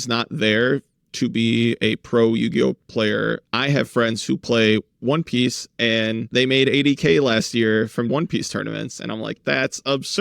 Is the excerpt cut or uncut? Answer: cut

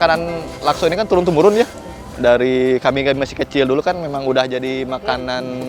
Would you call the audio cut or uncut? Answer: uncut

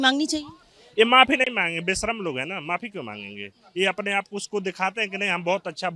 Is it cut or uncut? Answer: uncut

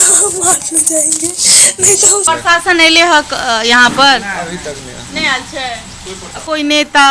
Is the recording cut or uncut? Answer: uncut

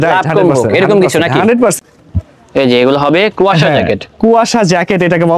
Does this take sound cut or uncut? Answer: cut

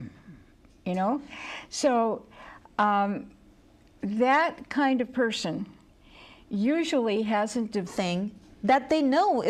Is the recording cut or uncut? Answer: uncut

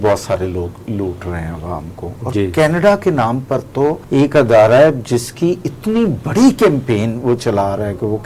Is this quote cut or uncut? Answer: cut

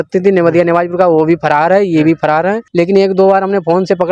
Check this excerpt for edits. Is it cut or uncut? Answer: cut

